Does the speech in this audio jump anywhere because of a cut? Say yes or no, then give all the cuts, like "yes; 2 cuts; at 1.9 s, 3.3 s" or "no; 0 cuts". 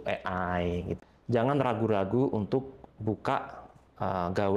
yes; 1 cut; at 1.0 s